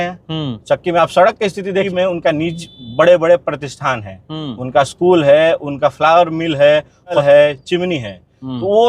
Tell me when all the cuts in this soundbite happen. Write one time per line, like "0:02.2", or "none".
0:01.9
0:07.2